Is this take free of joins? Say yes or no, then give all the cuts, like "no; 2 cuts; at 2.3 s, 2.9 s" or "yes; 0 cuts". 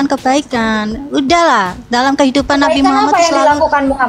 yes; 0 cuts